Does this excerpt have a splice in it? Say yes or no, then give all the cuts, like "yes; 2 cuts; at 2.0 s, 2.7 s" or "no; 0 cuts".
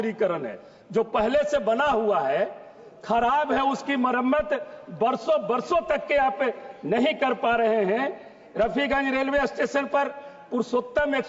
no; 0 cuts